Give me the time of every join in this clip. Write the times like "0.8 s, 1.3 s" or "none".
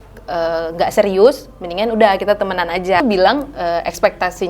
3.0 s